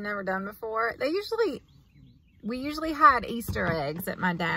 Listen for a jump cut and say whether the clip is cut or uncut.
uncut